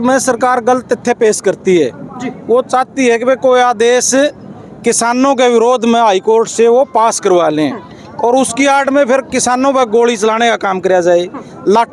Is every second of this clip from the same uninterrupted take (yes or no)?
yes